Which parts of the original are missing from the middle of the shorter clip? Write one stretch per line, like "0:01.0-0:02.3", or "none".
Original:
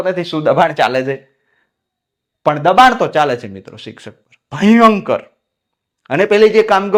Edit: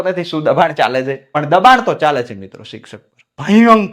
0:01.4-0:02.5